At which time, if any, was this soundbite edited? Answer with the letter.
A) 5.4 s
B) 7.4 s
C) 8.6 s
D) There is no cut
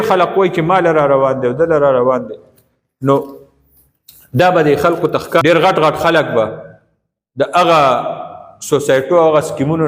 A